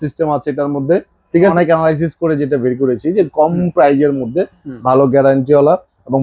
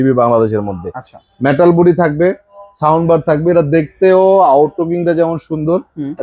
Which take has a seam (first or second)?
first